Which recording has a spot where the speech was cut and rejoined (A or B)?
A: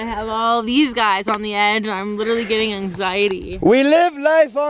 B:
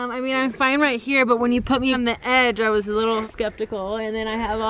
B